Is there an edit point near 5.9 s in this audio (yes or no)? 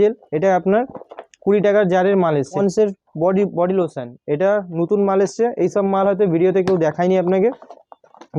no